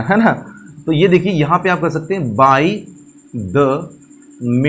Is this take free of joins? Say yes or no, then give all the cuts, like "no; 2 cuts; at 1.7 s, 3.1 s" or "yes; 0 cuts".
yes; 0 cuts